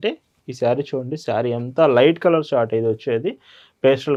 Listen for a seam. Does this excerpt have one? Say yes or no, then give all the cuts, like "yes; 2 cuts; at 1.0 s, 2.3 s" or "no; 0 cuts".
no; 0 cuts